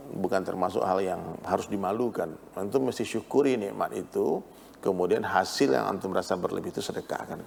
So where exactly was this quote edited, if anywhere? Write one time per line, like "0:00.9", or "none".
none